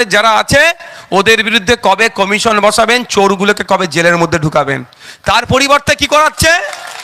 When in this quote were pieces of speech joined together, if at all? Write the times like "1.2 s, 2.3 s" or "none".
none